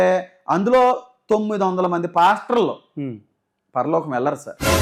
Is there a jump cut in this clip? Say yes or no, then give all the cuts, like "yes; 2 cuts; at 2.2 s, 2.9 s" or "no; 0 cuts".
no; 0 cuts